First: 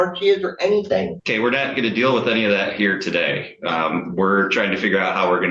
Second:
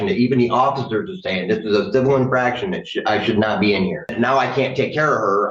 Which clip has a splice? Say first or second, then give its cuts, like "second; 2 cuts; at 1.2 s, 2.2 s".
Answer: second; 1 cut; at 4.1 s